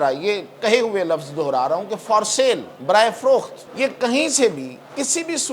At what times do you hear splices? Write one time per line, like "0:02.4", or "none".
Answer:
0:02.7
0:03.6